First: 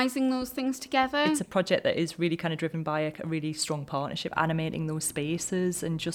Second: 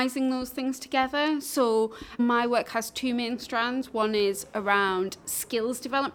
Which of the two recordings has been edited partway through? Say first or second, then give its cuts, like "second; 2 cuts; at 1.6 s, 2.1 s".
first; 2 cuts; at 1.4 s, 4.3 s